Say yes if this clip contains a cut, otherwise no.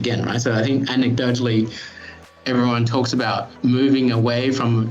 yes